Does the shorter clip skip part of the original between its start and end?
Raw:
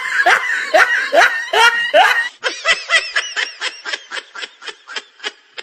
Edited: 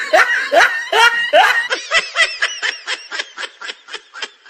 yes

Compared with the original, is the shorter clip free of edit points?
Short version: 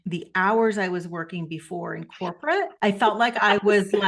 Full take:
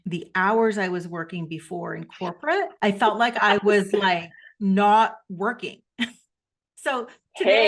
yes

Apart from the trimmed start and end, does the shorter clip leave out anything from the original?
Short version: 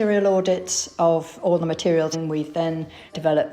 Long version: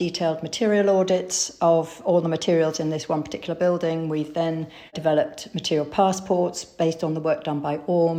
yes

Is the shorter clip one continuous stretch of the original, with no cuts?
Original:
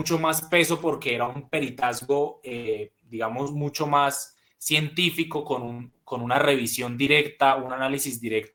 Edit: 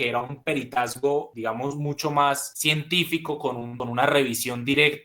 no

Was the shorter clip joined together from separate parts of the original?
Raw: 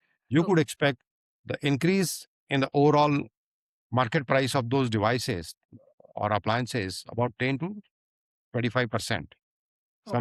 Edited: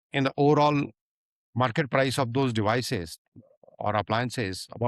no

